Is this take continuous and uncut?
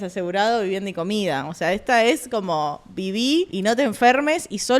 no; 1 cut; at 3.5 s

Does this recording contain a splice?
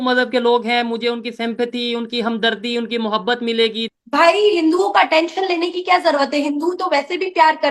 yes; 1 cut; at 3.8 s

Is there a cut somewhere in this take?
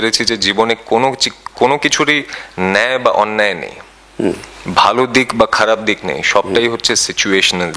no; 0 cuts

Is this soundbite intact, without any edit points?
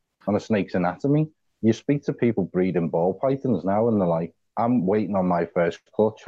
no; 2 cuts; at 1.5 s, 4.4 s

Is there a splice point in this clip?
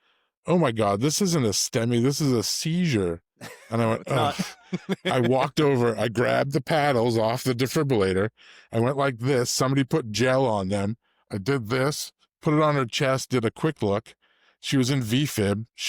no; 0 cuts

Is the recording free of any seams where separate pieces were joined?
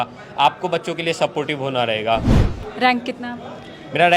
no; 1 cut; at 2.4 s

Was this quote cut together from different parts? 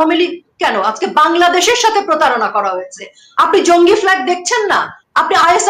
no; 0 cuts

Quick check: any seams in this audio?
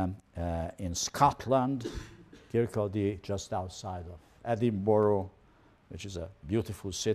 yes; 1 cut; at 2.2 s

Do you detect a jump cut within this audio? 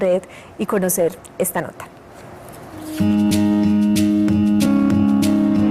yes; 1 cut; at 1.5 s

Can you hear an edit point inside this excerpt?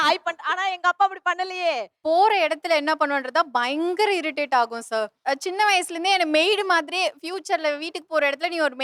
yes; 1 cut; at 1.9 s

